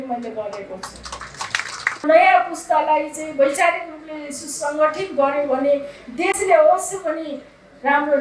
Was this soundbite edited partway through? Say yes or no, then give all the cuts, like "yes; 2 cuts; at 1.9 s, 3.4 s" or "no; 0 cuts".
yes; 1 cut; at 2.0 s